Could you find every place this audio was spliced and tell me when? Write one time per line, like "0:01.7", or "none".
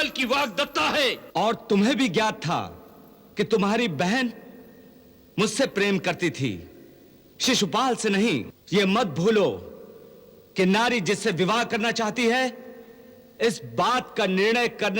0:01.2
0:08.6